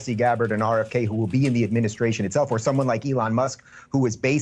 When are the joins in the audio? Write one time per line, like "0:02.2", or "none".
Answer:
0:01.3

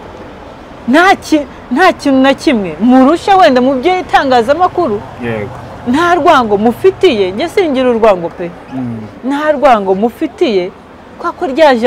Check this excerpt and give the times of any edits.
none

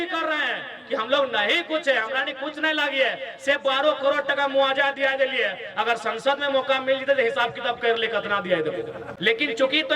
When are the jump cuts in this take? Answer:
0:09.0

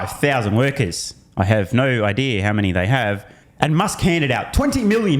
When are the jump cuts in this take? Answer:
0:03.4

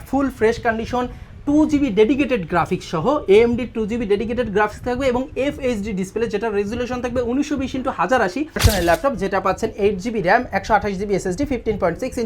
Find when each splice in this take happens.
0:08.6

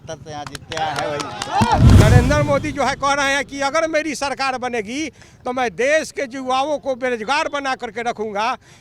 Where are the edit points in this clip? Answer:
0:01.9

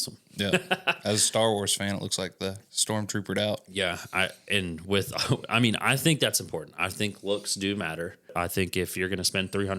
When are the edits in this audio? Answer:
0:08.3

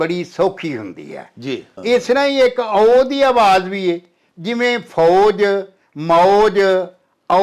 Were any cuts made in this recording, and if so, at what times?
0:01.7

